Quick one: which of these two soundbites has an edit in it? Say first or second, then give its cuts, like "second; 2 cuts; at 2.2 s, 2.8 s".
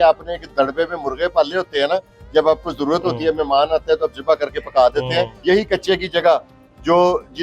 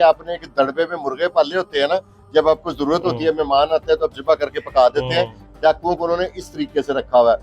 first; 1 cut; at 5.3 s